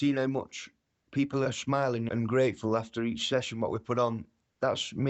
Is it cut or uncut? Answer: uncut